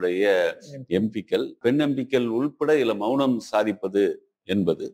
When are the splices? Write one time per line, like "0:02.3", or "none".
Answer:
0:01.6